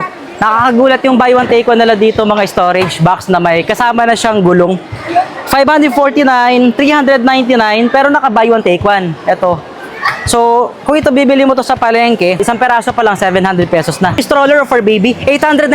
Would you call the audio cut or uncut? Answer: cut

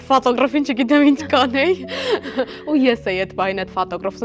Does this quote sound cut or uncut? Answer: uncut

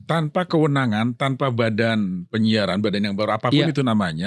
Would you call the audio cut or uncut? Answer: uncut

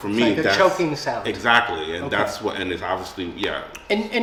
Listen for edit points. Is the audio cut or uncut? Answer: uncut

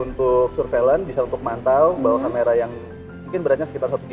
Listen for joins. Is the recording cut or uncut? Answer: uncut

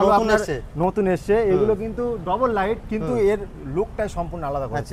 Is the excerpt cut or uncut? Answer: uncut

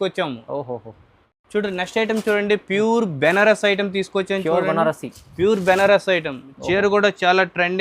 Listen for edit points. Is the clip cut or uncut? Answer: uncut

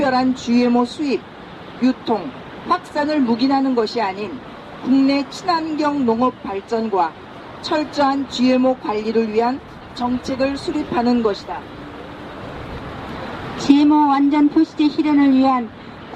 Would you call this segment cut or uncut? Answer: uncut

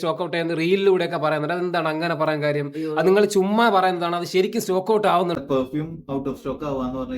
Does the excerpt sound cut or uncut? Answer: cut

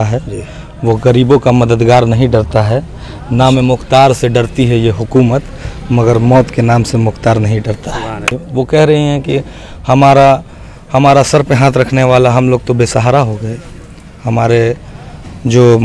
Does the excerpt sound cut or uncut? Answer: cut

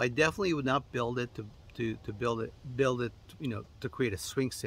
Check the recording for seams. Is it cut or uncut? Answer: uncut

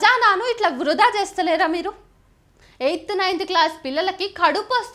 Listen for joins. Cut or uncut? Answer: cut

